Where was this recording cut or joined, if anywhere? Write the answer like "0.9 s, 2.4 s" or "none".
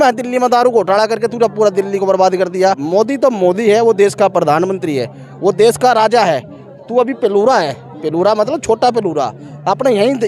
2.8 s